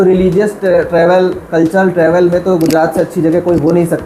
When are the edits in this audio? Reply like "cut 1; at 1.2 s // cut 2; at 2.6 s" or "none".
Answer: none